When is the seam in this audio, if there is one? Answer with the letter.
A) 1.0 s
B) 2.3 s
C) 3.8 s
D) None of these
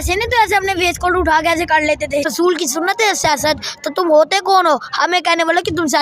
B